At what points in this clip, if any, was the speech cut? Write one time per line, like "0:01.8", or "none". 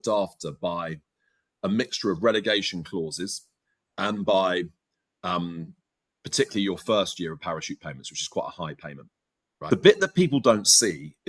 0:09.6